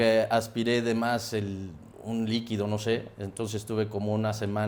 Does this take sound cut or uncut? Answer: uncut